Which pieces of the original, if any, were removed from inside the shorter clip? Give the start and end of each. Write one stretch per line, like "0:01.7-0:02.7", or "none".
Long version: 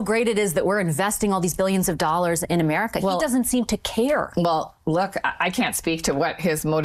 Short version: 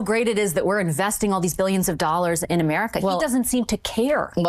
none